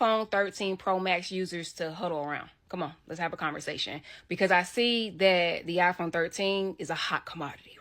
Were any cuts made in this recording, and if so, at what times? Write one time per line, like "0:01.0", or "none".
none